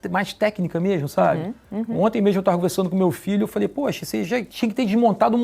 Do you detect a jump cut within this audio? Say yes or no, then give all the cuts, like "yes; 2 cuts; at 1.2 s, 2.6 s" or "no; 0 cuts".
yes; 1 cut; at 4.5 s